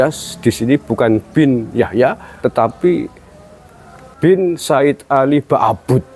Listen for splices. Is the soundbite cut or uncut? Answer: cut